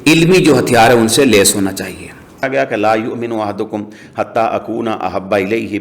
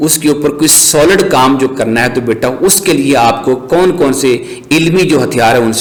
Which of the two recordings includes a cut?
first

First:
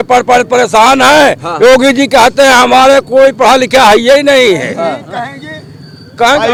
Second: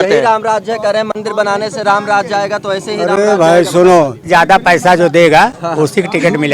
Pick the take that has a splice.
second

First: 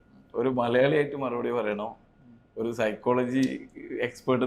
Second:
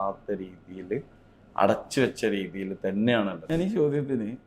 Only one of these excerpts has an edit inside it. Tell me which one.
second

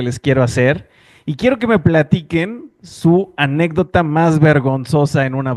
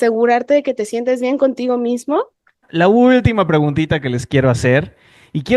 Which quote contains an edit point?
second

